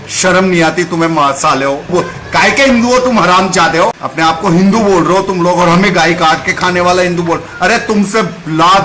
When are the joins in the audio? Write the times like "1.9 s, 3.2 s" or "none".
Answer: 1.9 s, 4.1 s

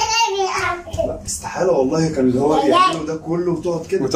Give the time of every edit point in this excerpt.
none

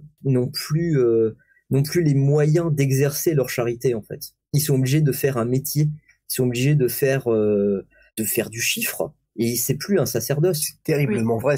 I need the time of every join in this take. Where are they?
none

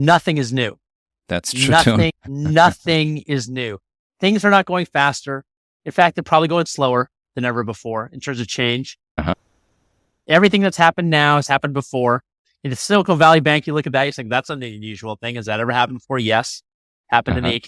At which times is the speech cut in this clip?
none

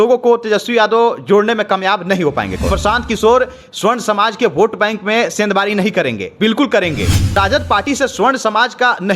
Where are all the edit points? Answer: 2.7 s, 7.3 s

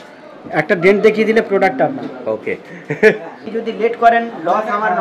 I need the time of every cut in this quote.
3.4 s

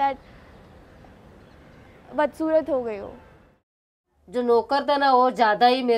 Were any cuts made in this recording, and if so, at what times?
3.8 s

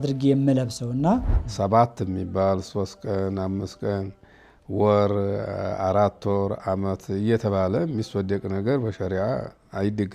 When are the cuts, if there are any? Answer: 1.4 s

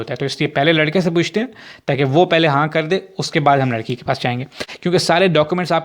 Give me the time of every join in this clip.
4.7 s

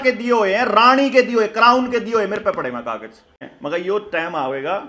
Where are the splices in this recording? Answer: 3.5 s

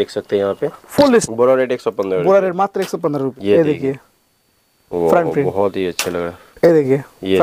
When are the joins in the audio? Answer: 1.2 s, 3.3 s, 6.4 s

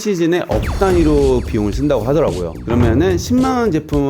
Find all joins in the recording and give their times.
2.6 s

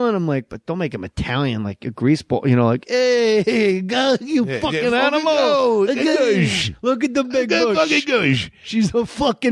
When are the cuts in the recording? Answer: 1.1 s

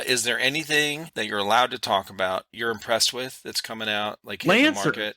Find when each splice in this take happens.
1.0 s, 2.5 s

